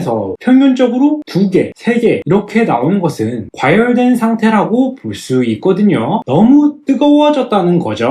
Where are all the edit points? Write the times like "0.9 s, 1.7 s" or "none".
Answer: none